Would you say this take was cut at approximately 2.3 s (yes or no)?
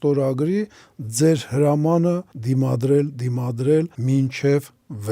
yes